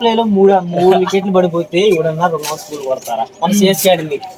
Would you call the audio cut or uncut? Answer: uncut